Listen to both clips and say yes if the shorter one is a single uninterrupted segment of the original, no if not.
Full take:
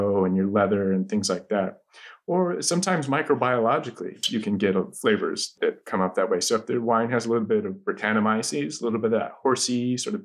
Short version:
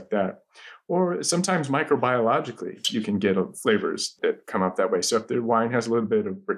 yes